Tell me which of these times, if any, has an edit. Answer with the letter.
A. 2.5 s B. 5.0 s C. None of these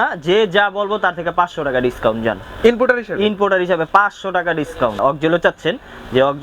B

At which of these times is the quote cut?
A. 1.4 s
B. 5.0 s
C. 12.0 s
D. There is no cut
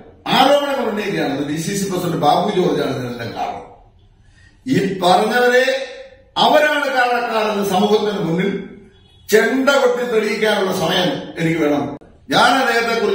C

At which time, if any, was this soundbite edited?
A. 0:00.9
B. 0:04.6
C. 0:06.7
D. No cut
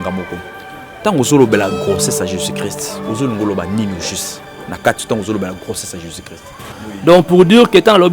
C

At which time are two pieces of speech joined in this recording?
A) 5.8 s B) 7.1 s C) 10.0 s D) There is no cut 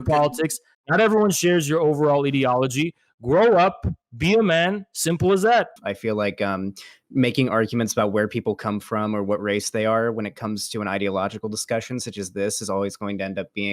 A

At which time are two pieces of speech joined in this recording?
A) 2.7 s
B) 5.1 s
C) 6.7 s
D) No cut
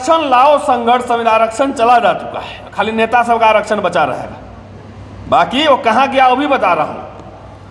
D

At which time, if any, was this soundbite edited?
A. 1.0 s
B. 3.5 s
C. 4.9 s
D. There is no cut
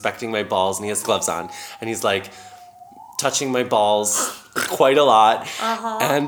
A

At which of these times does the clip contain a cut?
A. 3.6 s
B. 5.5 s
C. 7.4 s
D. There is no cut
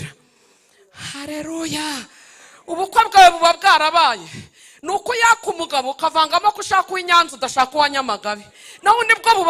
D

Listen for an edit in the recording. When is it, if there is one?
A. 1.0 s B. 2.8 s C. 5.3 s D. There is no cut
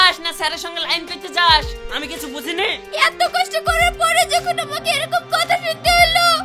D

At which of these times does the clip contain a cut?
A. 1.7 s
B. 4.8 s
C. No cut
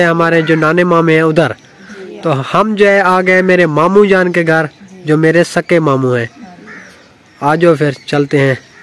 C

